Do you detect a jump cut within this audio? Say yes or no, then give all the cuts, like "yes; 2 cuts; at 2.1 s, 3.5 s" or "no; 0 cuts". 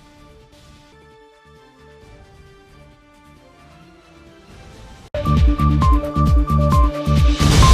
yes; 1 cut; at 5.0 s